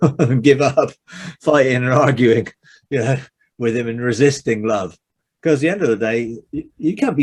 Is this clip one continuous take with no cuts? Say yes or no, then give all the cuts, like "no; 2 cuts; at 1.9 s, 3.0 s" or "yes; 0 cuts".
yes; 0 cuts